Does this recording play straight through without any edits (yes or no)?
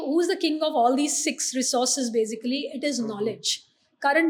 yes